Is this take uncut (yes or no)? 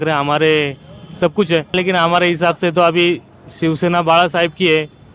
no